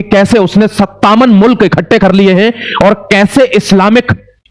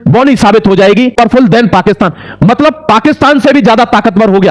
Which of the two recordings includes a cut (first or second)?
second